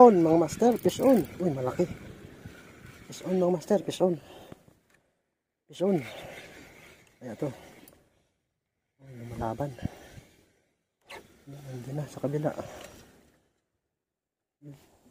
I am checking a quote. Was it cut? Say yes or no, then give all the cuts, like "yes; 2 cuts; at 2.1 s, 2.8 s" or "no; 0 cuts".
no; 0 cuts